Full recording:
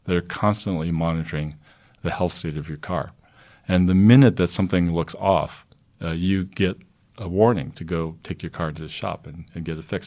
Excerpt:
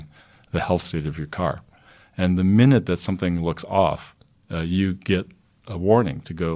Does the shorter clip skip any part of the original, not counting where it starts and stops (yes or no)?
no